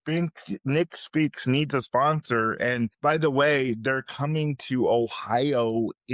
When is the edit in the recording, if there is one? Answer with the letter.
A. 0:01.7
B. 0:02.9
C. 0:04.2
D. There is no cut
B